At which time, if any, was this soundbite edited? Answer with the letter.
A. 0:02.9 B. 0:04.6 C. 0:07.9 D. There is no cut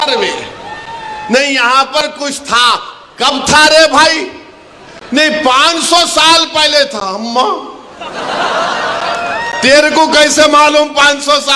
D